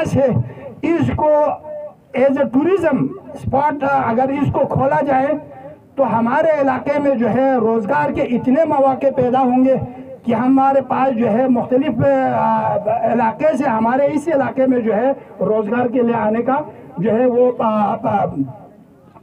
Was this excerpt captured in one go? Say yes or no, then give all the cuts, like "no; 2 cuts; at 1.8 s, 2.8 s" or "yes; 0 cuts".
yes; 0 cuts